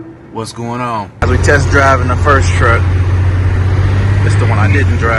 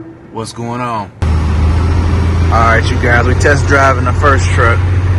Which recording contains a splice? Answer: first; 1 cut; at 1.2 s

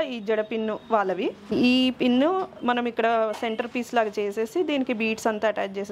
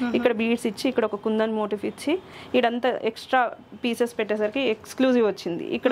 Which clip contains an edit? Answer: first; 1 cut; at 1.5 s

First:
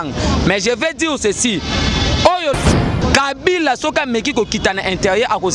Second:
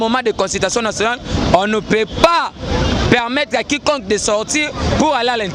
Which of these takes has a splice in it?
first; 1 cut; at 2.7 s

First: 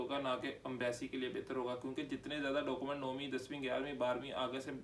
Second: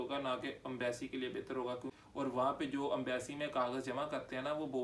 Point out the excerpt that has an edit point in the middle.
second; 1 cut; at 1.9 s

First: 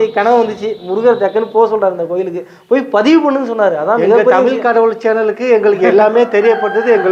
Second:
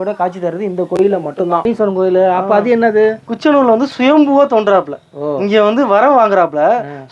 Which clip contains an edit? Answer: second; 1 cut; at 1.7 s

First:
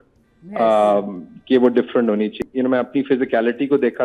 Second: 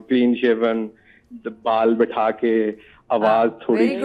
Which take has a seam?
first; 1 cut; at 2.4 s

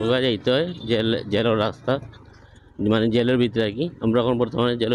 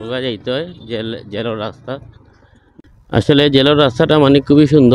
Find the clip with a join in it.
second; 1 cut; at 2.6 s

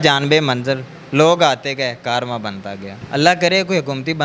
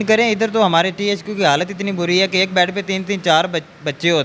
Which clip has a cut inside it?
first; 1 cut; at 2.9 s

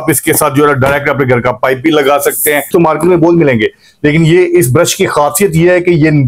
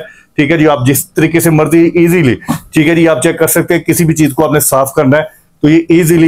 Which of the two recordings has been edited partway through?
first; 1 cut; at 2.7 s

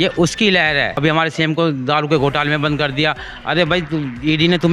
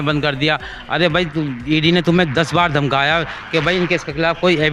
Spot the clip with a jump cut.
first; 1 cut; at 1.0 s

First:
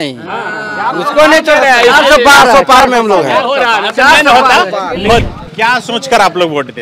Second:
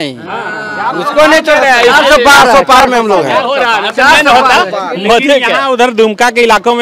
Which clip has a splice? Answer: first; 1 cut; at 5.2 s

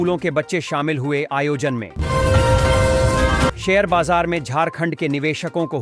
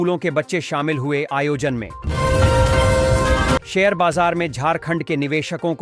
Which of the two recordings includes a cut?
second; 2 cuts; at 1.9 s, 3.7 s

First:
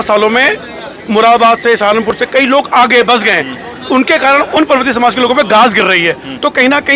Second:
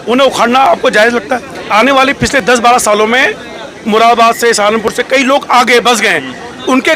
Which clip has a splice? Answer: second; 1 cut; at 1.6 s

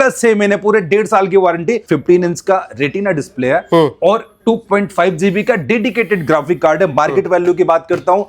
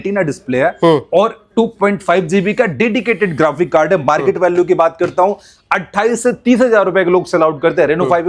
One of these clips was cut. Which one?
first; 1 cut; at 1.8 s

